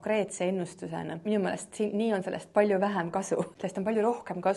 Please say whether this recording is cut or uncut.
cut